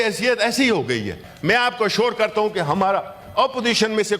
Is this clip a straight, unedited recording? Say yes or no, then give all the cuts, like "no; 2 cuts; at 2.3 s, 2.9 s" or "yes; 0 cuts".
no; 1 cut; at 1.2 s